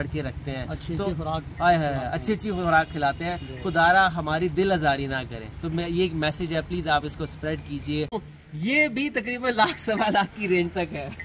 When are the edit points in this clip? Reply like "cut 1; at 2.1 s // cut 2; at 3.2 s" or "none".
cut 1; at 8.2 s